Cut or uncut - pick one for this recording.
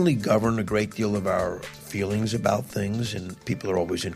cut